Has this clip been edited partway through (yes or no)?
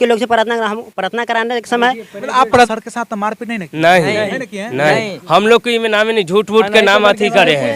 yes